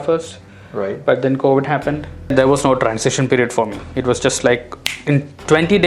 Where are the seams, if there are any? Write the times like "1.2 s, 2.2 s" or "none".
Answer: 2.3 s